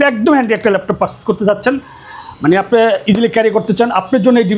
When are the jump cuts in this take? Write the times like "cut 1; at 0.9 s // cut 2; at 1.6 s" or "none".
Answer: none